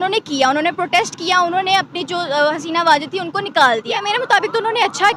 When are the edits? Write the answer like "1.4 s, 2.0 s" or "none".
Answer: 4.0 s